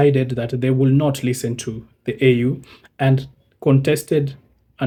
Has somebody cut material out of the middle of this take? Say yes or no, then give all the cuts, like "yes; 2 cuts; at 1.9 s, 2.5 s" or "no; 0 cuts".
no; 0 cuts